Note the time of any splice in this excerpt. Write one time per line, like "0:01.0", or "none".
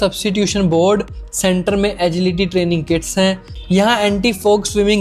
0:03.5